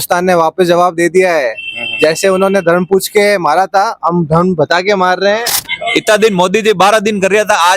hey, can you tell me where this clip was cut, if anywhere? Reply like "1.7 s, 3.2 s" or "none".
5.5 s